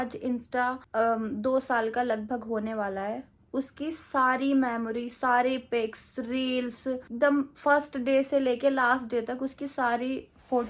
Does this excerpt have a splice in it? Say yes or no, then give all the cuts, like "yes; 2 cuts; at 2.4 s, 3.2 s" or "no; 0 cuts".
no; 0 cuts